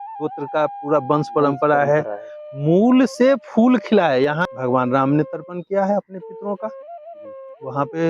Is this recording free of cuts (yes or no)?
no